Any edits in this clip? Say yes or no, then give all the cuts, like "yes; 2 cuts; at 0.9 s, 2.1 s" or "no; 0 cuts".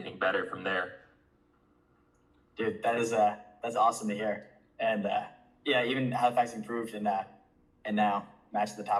no; 0 cuts